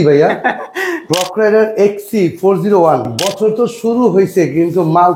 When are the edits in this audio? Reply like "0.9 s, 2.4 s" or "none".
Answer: 1.1 s, 3.2 s